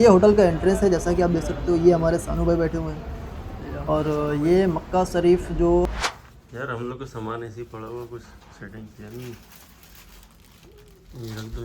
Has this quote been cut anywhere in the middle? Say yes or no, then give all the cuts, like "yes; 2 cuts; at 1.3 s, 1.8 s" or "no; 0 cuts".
yes; 1 cut; at 5.9 s